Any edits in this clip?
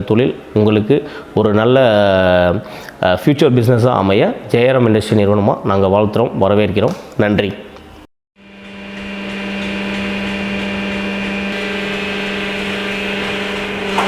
no; 0 cuts

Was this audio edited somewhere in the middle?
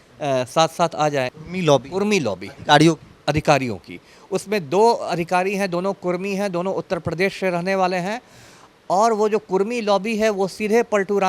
yes; 1 cut; at 1.4 s

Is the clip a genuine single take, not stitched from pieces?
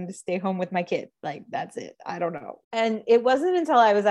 no; 1 cut; at 2.5 s

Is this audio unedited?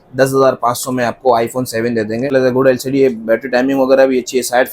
no; 1 cut; at 2.3 s

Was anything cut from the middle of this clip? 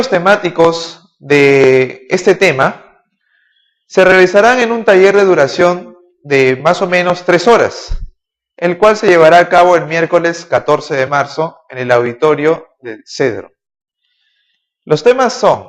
no; 0 cuts

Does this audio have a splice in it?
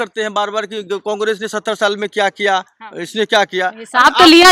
no; 0 cuts

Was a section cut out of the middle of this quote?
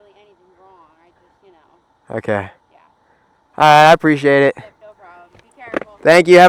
no; 0 cuts

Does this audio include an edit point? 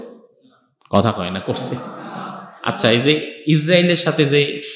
no; 0 cuts

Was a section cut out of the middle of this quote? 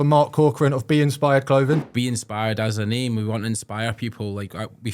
yes; 1 cut; at 1.9 s

